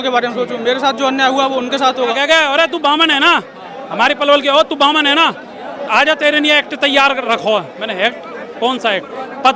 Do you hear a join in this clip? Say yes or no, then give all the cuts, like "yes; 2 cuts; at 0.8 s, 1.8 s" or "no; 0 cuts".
yes; 1 cut; at 2.1 s